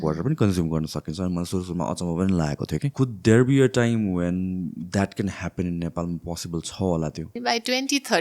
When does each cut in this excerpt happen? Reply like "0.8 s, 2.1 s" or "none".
2.9 s, 7.3 s